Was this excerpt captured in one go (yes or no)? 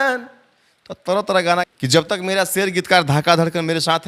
no